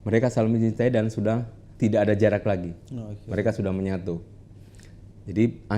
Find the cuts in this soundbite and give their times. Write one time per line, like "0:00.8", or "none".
0:01.6

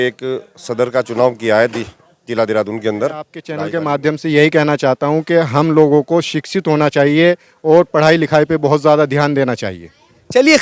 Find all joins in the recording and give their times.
0:03.4

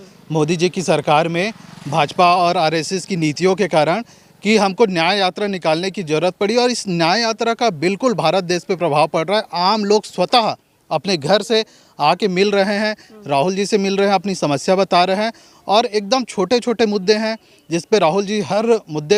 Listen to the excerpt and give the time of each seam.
none

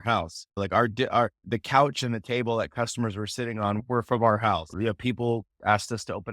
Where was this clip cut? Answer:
0:04.7

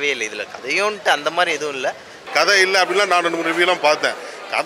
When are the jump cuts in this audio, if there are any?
0:02.2

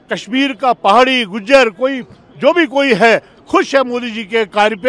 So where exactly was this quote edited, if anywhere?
none

